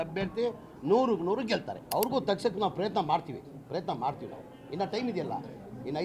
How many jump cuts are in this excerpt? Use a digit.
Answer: 1